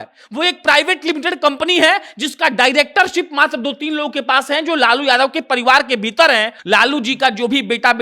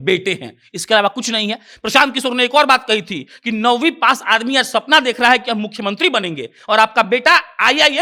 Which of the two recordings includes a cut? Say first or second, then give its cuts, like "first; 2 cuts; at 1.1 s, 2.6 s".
first; 1 cut; at 6.6 s